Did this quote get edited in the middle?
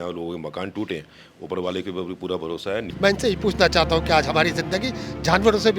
yes; 1 cut; at 2.9 s

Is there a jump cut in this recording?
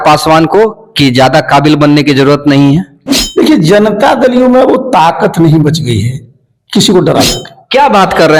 no; 0 cuts

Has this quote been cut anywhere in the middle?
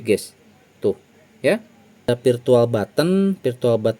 yes; 1 cut; at 2.1 s

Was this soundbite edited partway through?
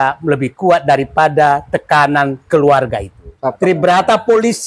yes; 1 cut; at 3.5 s

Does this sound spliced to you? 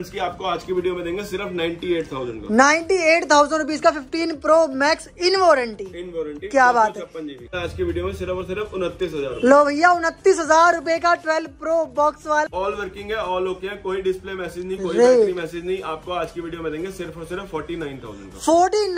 yes; 2 cuts; at 7.5 s, 12.5 s

